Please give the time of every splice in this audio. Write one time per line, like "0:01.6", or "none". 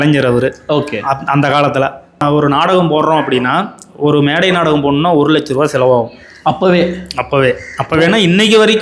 0:02.2